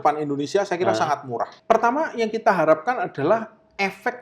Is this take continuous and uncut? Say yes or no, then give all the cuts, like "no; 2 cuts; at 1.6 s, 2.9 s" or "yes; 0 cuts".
no; 1 cut; at 1.6 s